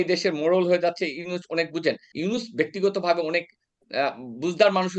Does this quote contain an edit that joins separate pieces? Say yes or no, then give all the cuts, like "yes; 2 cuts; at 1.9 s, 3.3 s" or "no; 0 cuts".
yes; 1 cut; at 2.1 s